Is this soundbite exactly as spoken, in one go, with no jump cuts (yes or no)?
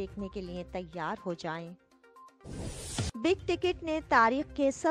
no